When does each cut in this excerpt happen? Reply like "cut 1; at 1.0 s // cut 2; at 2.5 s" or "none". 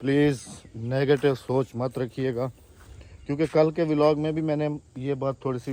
none